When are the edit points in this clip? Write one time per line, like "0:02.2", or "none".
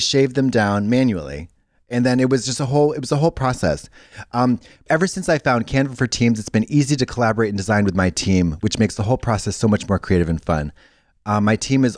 0:04.7